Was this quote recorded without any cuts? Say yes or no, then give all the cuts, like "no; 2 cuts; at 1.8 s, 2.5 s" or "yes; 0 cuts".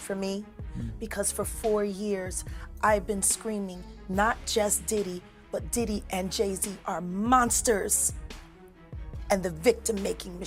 yes; 0 cuts